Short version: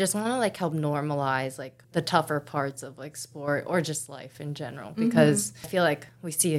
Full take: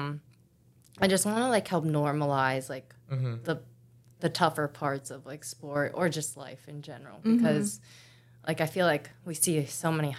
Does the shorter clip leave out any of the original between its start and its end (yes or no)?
yes